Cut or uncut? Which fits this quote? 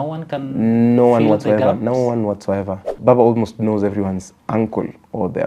cut